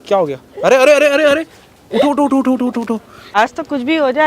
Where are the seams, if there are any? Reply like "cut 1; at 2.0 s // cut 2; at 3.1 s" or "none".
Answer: cut 1; at 3.2 s